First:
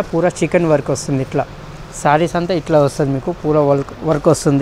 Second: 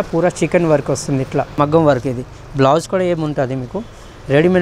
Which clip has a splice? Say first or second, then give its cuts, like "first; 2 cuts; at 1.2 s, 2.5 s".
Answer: second; 1 cut; at 1.5 s